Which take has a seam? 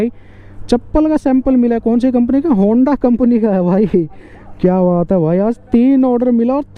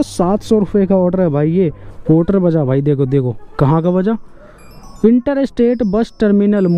second; 1 cut; at 1.9 s

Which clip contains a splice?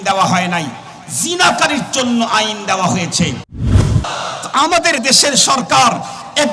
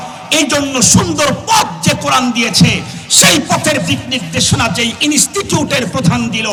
first; 1 cut; at 3.7 s

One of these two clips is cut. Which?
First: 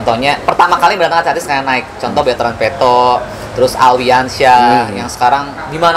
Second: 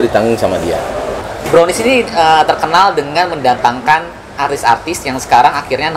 second; 1 cut; at 1.1 s

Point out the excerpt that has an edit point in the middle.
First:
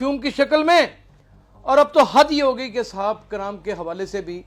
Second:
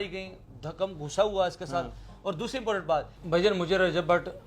second; 1 cut; at 3.2 s

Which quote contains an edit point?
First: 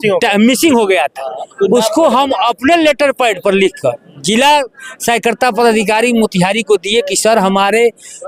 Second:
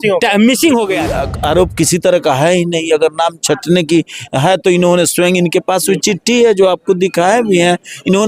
second; 1 cut; at 1.3 s

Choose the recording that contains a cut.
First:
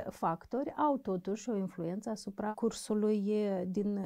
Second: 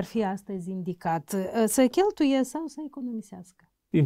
first; 1 cut; at 2.5 s

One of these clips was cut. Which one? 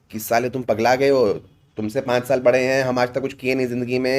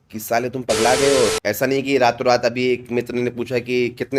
second; 1 cut; at 1.3 s

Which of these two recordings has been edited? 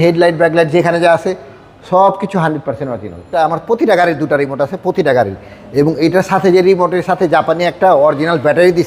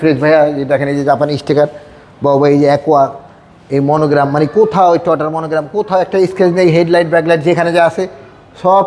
first; 1 cut; at 3.3 s

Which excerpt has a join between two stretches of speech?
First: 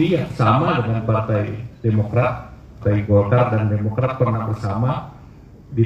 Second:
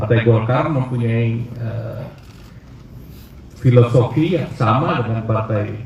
first; 1 cut; at 2.7 s

